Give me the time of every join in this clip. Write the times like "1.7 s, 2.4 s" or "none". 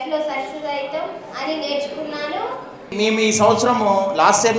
2.9 s